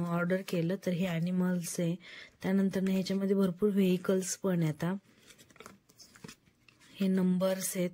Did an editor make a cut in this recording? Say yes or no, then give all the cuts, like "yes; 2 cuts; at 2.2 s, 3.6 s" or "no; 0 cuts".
no; 0 cuts